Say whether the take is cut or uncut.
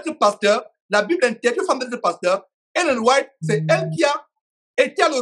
uncut